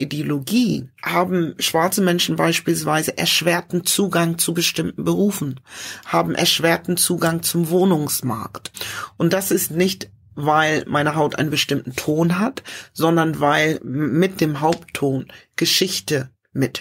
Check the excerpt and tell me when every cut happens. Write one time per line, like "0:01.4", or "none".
0:00.9
0:08.7